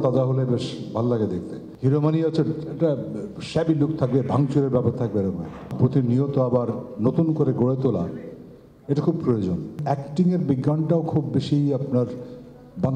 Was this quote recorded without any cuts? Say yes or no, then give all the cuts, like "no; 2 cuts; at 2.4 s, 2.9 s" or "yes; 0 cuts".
no; 3 cuts; at 1.6 s, 5.7 s, 9.8 s